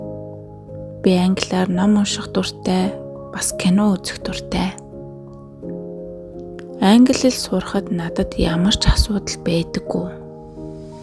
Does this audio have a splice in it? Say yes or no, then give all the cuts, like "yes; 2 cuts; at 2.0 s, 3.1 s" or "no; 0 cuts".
yes; 2 cuts; at 1.0 s, 10.1 s